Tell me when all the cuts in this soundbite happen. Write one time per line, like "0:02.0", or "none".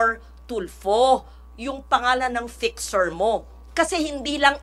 0:03.6